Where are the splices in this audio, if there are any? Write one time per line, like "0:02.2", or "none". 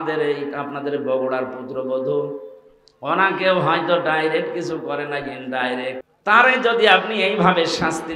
0:06.1